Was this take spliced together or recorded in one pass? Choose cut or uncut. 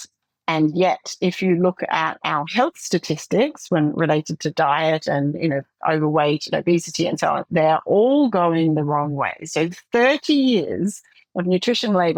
uncut